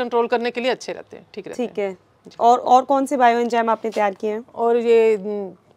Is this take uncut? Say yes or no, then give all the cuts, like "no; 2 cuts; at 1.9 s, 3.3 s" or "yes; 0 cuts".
yes; 0 cuts